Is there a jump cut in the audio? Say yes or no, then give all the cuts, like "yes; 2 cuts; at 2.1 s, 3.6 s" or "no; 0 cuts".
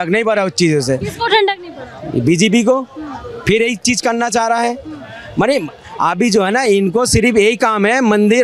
no; 0 cuts